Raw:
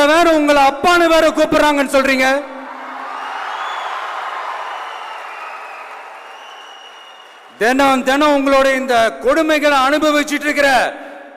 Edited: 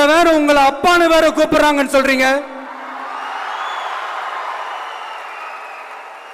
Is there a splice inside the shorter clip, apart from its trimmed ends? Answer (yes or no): no